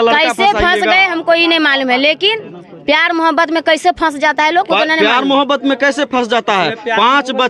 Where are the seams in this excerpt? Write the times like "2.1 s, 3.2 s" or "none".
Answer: none